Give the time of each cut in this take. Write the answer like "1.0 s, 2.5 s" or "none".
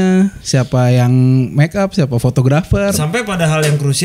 3.0 s